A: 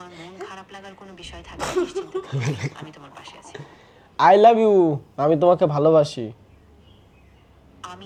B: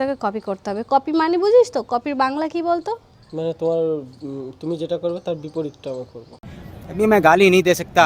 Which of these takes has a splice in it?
B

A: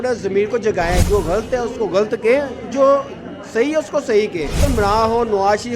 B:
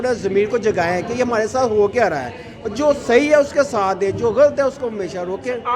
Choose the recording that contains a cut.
A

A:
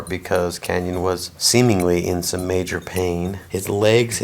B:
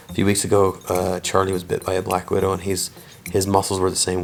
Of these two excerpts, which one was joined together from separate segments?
A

